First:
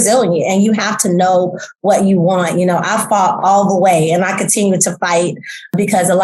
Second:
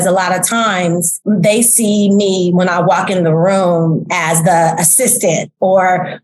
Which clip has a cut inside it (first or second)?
second